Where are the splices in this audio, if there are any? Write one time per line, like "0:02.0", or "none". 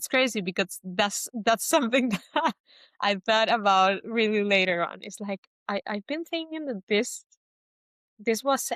none